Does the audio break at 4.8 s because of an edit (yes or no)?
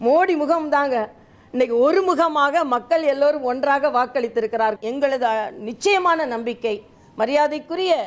yes